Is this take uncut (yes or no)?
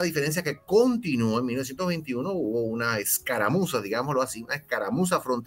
yes